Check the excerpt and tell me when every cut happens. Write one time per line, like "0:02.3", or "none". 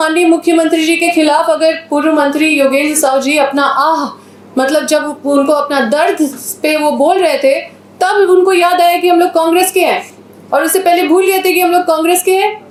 none